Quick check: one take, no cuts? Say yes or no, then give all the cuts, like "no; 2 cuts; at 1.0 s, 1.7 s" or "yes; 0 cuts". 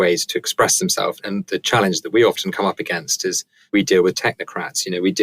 no; 2 cuts; at 1.2 s, 3.5 s